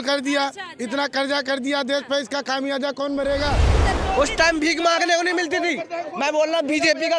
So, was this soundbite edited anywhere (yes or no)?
yes